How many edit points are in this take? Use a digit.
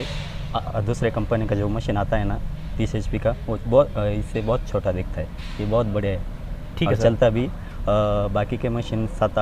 0